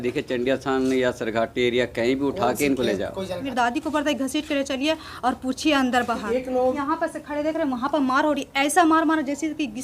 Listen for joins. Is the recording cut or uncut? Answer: cut